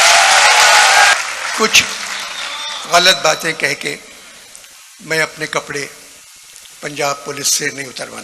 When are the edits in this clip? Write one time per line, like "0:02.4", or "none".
0:01.1